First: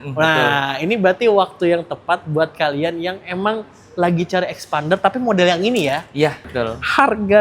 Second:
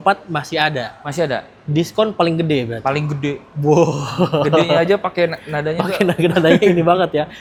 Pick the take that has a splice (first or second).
first